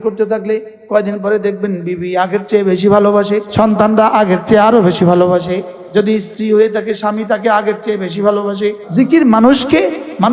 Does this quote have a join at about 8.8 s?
yes; 3 cuts; at 3.5 s, 5.7 s, 8.8 s

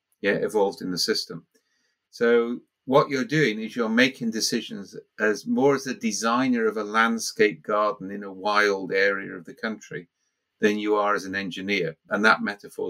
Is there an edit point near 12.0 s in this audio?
yes; 1 cut; at 12.0 s

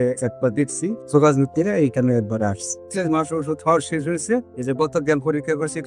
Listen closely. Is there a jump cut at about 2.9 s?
yes; 2 cuts; at 1.0 s, 2.9 s

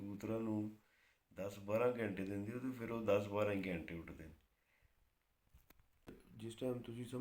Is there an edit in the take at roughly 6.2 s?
yes; 1 cut; at 6.2 s

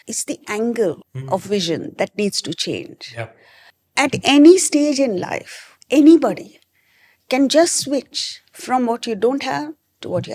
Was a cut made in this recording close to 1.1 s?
yes; 1 cut; at 1.1 s

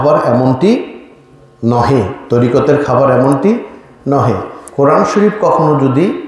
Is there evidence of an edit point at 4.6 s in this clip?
yes; 1 cut; at 4.6 s

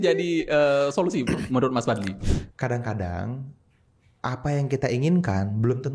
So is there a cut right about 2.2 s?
yes; 1 cut; at 2.2 s

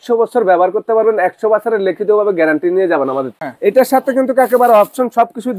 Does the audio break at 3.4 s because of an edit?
yes; 1 cut; at 3.4 s

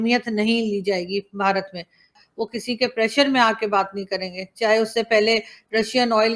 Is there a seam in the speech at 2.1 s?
yes; 1 cut; at 2.1 s

